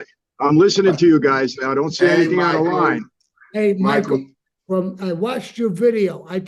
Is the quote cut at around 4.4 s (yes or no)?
no